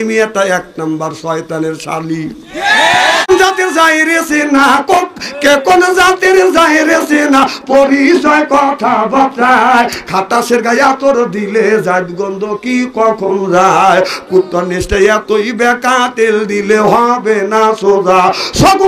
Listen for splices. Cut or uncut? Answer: cut